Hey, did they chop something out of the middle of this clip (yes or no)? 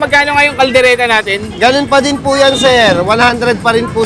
yes